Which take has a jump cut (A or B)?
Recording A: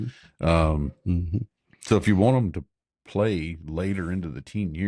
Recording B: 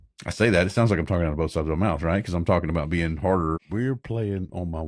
B